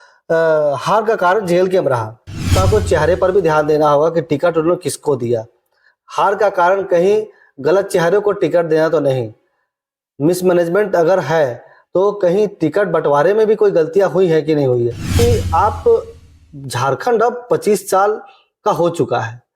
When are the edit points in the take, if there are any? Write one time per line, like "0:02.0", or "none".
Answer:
0:02.5
0:15.1